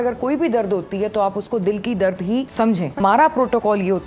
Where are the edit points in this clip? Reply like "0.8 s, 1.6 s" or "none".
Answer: 2.7 s